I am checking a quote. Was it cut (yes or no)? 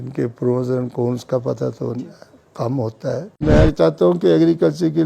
yes